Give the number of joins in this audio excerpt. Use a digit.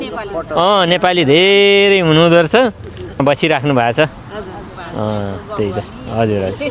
1